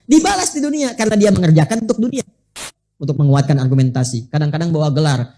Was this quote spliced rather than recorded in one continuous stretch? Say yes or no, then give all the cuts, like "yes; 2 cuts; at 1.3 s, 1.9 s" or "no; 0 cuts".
yes; 1 cut; at 2.7 s